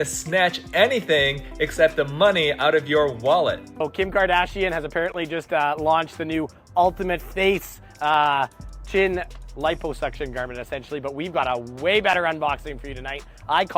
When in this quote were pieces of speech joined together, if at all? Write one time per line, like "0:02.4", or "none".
0:03.7